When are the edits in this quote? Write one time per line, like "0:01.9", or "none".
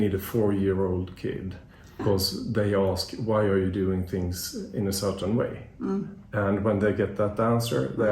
0:02.0